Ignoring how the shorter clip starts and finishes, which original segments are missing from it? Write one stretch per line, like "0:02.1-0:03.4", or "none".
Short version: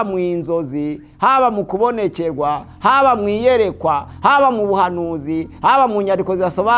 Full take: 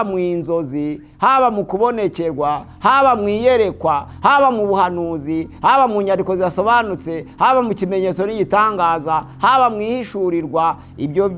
none